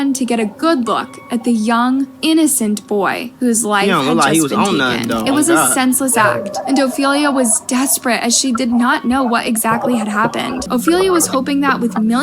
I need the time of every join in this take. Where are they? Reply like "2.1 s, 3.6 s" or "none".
10.6 s